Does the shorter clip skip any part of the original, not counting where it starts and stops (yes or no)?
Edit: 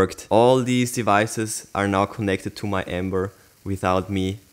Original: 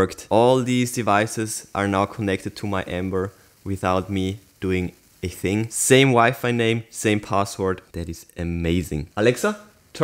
no